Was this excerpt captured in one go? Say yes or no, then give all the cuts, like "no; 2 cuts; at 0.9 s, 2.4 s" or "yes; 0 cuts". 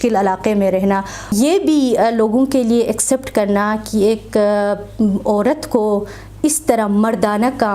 no; 1 cut; at 1.3 s